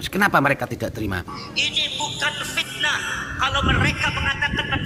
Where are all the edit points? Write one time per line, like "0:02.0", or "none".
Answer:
0:01.4